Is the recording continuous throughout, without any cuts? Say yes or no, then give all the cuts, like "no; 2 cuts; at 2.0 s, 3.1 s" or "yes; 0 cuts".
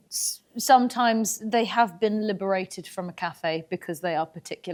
yes; 0 cuts